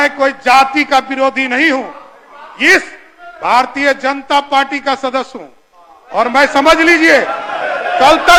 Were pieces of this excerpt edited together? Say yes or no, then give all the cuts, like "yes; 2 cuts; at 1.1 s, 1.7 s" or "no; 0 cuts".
no; 0 cuts